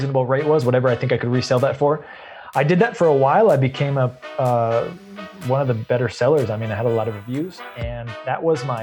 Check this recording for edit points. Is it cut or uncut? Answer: uncut